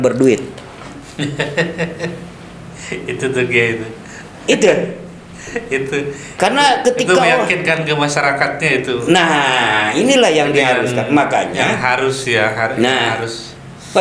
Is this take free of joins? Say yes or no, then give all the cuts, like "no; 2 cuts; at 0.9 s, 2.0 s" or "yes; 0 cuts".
yes; 0 cuts